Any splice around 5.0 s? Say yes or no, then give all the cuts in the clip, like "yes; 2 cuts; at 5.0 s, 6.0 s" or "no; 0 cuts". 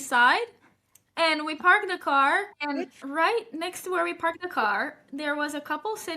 no; 1 cut; at 2.5 s